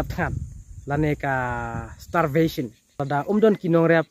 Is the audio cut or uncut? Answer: cut